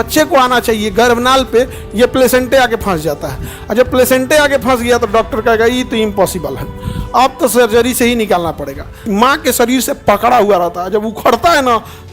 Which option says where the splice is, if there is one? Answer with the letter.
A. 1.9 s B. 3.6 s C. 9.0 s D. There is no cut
C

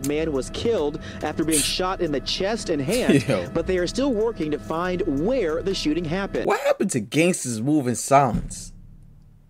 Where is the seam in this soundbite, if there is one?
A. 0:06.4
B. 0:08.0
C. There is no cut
A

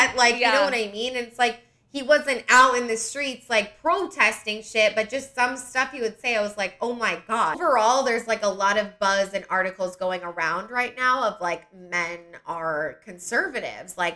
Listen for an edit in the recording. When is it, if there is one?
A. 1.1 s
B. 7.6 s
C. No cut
B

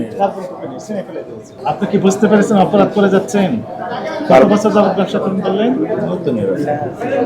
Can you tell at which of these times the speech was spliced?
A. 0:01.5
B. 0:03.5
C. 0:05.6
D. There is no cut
A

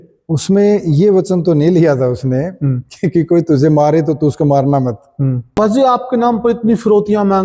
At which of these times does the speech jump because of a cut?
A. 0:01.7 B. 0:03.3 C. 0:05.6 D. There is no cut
C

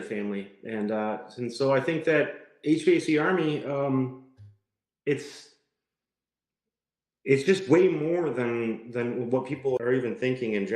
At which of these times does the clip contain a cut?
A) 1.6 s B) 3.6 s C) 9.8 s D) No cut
C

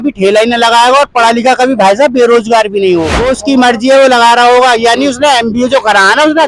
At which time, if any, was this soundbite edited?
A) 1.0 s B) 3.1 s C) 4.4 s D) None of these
B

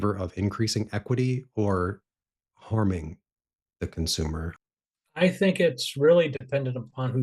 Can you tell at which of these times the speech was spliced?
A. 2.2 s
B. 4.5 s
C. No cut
B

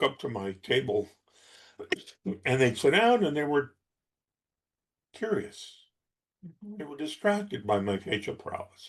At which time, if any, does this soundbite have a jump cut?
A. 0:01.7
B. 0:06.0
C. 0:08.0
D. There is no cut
D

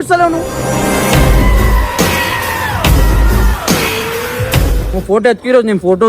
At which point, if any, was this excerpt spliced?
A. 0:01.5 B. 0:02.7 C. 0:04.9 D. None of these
C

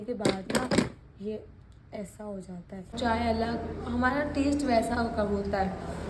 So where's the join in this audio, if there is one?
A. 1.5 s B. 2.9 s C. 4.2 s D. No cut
B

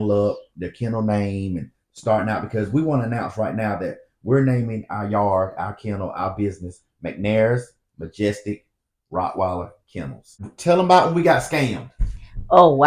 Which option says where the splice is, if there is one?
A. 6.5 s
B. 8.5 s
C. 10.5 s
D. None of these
C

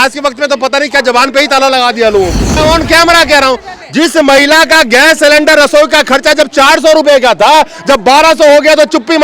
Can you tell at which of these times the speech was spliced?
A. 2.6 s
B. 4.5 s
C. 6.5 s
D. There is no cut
A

